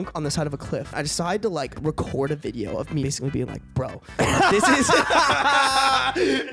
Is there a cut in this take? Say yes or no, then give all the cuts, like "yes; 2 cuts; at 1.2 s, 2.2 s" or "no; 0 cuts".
yes; 3 cuts; at 1.0 s, 1.8 s, 3.0 s